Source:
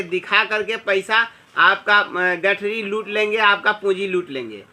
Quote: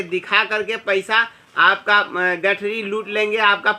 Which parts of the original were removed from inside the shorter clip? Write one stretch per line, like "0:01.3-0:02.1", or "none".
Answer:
none